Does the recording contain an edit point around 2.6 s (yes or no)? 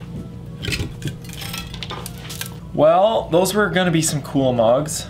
yes